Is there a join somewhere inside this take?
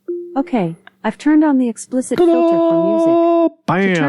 no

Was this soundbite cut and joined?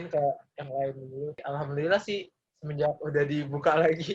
yes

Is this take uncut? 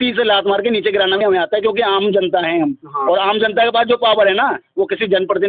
yes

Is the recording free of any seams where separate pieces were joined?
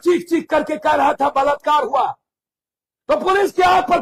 yes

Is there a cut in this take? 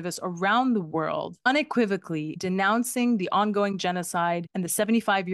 yes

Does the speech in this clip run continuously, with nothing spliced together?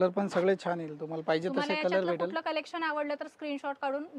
yes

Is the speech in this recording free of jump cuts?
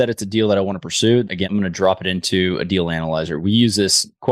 no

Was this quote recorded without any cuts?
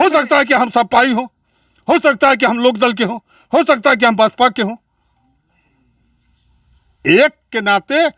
yes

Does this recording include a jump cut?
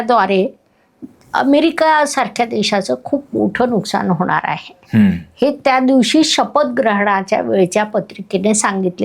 no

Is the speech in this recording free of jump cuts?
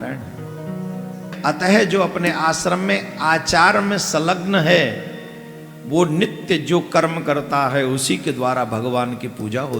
no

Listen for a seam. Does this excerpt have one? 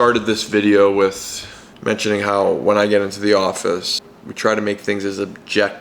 no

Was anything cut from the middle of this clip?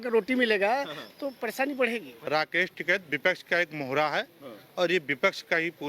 yes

